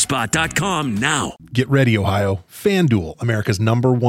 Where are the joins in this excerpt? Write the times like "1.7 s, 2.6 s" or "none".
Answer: 1.5 s